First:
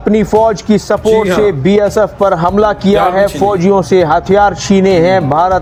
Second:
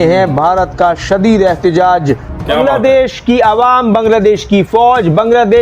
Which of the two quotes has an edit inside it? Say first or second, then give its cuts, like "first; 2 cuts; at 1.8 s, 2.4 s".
second; 1 cut; at 2.5 s